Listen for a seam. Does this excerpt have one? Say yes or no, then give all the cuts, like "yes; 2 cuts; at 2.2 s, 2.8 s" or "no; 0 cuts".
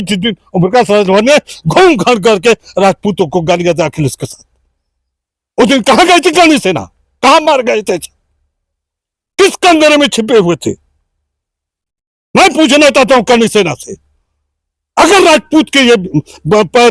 no; 0 cuts